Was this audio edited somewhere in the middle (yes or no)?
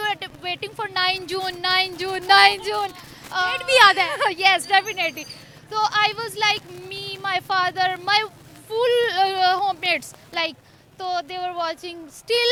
no